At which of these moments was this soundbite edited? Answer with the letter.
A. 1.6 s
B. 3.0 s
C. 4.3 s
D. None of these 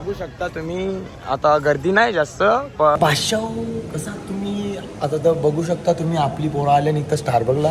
B